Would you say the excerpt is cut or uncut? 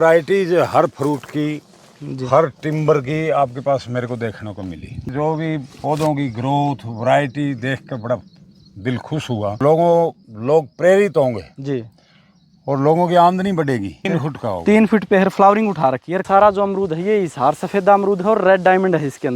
cut